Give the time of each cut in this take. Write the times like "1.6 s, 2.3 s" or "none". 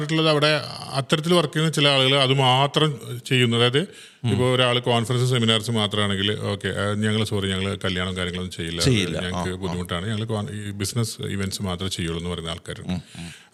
none